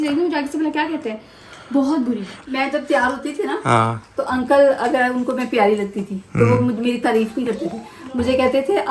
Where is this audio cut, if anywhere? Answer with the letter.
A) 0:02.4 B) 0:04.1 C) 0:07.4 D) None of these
A